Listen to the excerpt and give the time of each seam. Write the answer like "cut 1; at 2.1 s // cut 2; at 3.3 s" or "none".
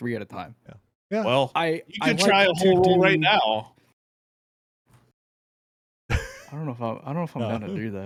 none